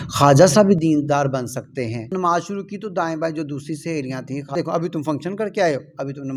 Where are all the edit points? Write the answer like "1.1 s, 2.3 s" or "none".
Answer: 2.1 s, 4.5 s